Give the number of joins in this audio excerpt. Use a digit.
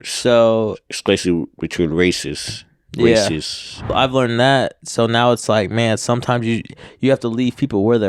1